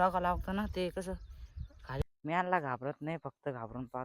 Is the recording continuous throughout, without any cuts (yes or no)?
no